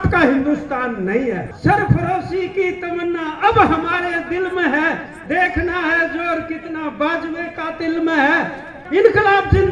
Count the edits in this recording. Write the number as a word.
two